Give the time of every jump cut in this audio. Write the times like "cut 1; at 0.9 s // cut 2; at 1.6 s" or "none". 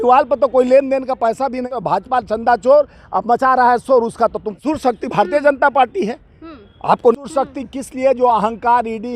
cut 1; at 1.8 s // cut 2; at 4.5 s // cut 3; at 7.1 s

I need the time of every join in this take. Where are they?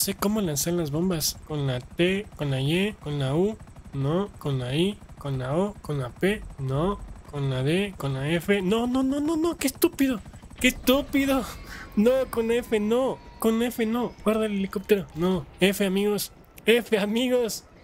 cut 1; at 1.4 s // cut 2; at 3.0 s // cut 3; at 6.5 s

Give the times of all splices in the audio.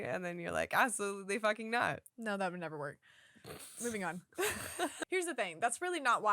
cut 1; at 2.1 s // cut 2; at 5.0 s

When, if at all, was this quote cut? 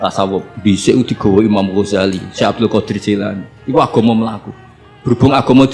none

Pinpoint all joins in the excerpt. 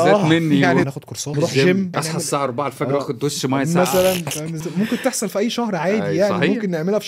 cut 1; at 0.9 s // cut 2; at 1.9 s // cut 3; at 4.6 s

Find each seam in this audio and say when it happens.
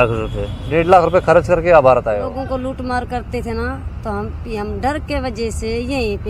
cut 1; at 2.3 s

